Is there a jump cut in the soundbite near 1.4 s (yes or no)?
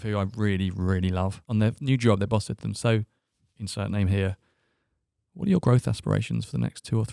yes